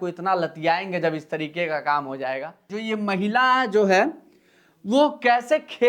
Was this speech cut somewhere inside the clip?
yes; 1 cut; at 2.7 s

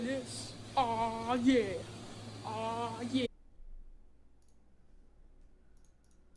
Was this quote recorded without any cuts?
yes; 0 cuts

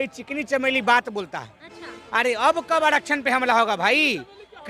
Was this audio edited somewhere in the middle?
no; 0 cuts

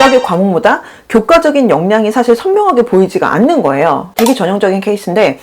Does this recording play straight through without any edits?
no; 1 cut; at 4.0 s

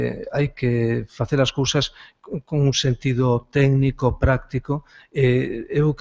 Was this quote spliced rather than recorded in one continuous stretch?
no; 0 cuts

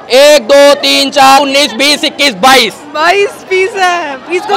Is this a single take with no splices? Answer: no; 1 cut; at 1.4 s

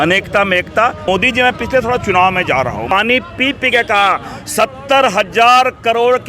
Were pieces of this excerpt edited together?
yes; 2 cuts; at 1.1 s, 2.9 s

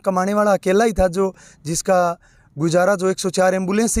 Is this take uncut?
yes; 0 cuts

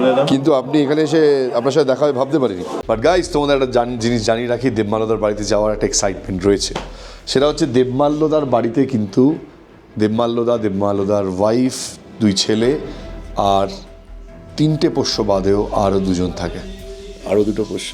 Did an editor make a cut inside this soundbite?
yes; 1 cut; at 2.7 s

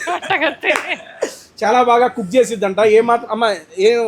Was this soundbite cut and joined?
no; 0 cuts

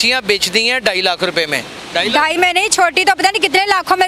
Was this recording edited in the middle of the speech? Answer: no; 0 cuts

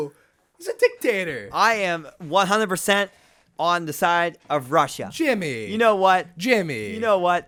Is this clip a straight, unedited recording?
yes; 0 cuts

